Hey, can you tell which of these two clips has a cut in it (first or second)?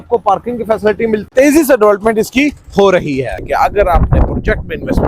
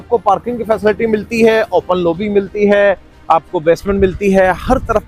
first